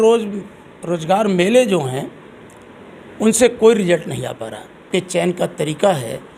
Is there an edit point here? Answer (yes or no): yes